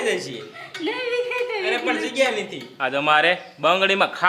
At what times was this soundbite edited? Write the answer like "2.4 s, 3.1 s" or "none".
2.7 s